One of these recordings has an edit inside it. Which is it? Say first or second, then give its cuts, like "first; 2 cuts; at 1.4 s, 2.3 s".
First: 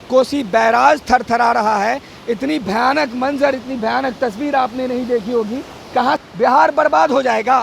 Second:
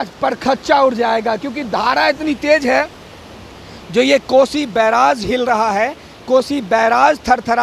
first; 1 cut; at 6.0 s